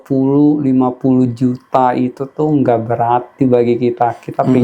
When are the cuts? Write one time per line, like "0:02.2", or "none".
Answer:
none